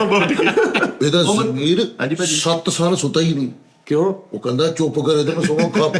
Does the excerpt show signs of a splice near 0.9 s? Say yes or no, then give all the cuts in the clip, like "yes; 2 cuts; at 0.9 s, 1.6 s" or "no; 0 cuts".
yes; 1 cut; at 0.9 s